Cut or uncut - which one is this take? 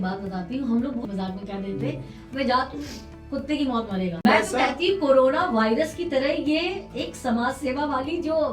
cut